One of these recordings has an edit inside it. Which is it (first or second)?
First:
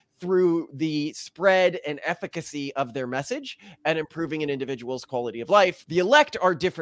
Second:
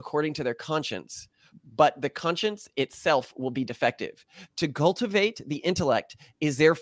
first